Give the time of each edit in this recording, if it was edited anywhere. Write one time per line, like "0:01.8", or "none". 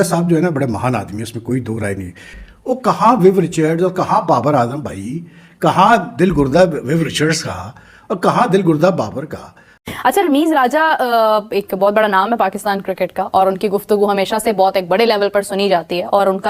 0:02.4
0:09.7